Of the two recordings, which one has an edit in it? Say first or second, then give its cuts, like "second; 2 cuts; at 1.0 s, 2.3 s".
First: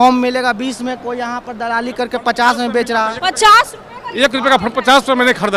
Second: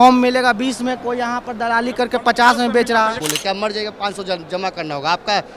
second; 1 cut; at 3.2 s